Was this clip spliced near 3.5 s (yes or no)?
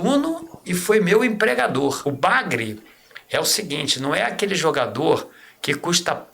no